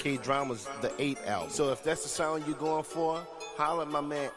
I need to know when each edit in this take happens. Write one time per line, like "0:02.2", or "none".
none